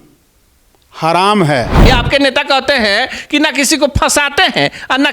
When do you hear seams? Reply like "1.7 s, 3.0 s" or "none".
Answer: 1.8 s